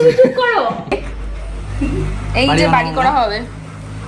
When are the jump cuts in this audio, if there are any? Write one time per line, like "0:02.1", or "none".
0:00.9